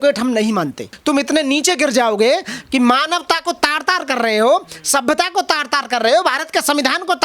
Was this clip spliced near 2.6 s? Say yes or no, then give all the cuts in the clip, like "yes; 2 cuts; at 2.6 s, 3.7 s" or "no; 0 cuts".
no; 1 cut; at 0.9 s